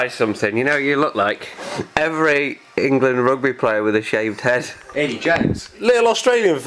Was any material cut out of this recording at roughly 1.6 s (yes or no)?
yes